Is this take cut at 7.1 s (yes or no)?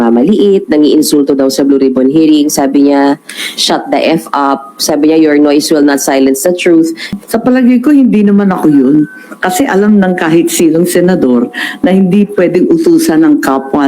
yes